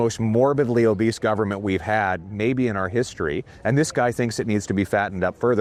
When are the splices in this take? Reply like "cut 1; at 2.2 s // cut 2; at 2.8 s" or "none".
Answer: none